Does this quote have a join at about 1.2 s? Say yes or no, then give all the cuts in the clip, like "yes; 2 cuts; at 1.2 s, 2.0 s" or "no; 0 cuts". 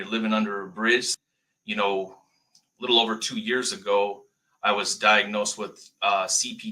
yes; 1 cut; at 1.2 s